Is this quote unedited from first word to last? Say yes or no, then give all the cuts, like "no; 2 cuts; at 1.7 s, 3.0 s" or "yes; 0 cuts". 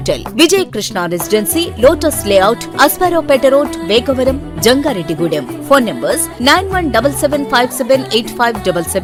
yes; 0 cuts